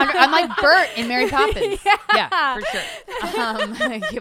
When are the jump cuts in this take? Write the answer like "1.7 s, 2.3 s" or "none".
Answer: 3.0 s